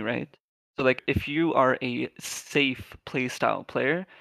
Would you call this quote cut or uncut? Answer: cut